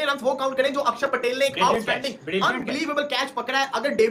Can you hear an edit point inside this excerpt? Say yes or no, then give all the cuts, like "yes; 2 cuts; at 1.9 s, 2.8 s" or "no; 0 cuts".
no; 0 cuts